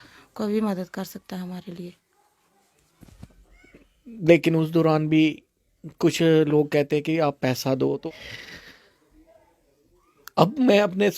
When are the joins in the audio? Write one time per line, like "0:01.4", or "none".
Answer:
0:03.3
0:08.0